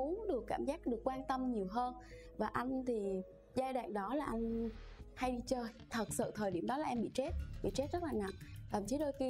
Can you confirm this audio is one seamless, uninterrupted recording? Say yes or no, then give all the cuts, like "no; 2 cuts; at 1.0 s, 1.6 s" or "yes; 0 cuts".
yes; 0 cuts